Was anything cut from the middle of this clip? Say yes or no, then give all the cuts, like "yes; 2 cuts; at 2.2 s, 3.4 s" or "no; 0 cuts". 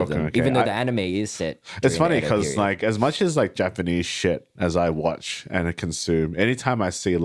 no; 0 cuts